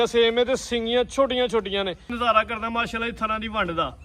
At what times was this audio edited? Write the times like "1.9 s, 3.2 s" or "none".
2.1 s